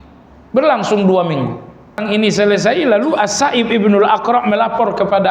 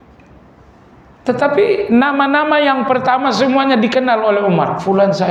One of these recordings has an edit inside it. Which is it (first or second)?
first